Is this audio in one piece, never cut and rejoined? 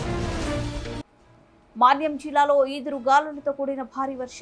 no; 1 cut; at 0.9 s

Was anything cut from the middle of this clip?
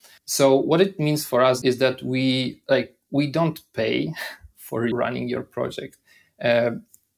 yes; 2 cuts; at 1.6 s, 4.9 s

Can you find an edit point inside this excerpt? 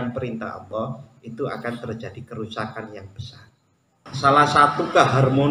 yes; 1 cut; at 4.0 s

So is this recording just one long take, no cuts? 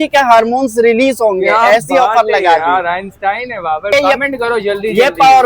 no; 1 cut; at 3.9 s

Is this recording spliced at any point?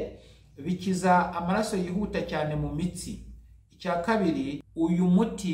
yes; 1 cut; at 4.6 s

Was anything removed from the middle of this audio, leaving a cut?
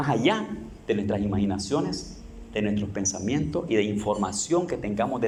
no; 0 cuts

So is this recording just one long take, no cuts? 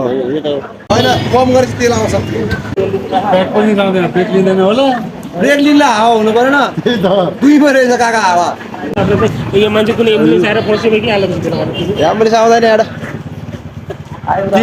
no; 3 cuts; at 0.9 s, 2.7 s, 9.0 s

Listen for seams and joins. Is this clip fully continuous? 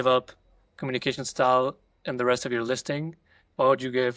yes; 0 cuts

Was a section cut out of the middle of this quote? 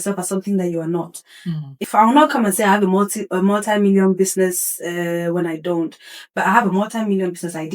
yes; 1 cut; at 1.8 s

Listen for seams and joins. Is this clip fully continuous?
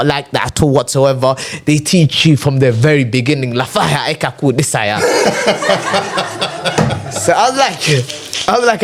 yes; 0 cuts

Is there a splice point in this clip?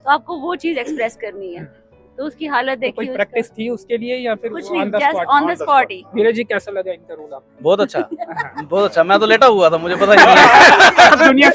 no; 0 cuts

